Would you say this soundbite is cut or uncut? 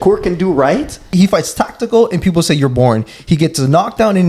cut